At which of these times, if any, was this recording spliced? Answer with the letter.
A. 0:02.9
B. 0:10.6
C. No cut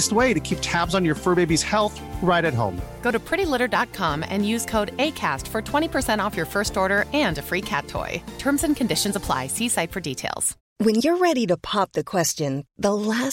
B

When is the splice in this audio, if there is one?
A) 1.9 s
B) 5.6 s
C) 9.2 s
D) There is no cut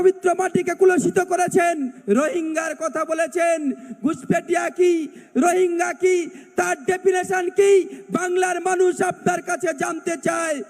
A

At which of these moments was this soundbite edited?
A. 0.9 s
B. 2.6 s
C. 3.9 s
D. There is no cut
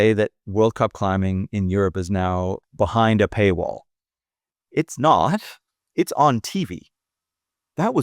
B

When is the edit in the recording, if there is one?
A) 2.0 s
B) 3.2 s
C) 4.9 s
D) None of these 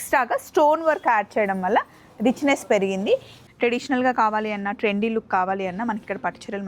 B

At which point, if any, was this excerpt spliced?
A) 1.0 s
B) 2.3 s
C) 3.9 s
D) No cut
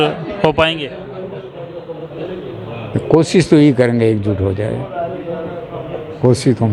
D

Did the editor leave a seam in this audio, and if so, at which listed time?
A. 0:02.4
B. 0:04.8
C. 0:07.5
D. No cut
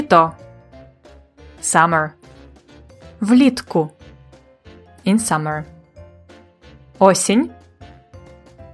C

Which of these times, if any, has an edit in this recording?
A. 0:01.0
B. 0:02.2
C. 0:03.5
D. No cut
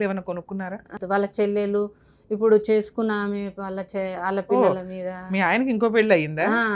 A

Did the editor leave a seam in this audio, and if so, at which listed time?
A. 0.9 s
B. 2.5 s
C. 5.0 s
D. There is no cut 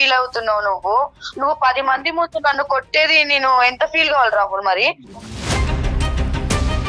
C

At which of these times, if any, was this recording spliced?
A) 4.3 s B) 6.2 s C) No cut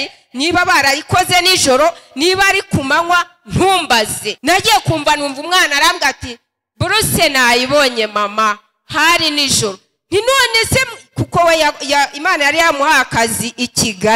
A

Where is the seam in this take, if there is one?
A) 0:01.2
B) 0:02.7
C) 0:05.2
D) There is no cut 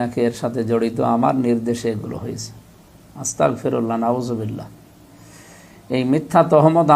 D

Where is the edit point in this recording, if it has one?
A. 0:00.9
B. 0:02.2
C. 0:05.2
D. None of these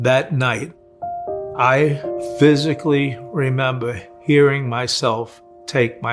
B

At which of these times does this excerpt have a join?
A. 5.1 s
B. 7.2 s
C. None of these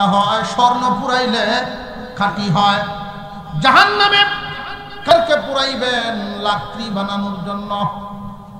A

